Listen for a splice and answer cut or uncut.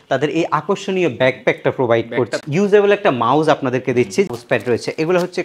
cut